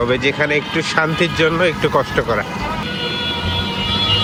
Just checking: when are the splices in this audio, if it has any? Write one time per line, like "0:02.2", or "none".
none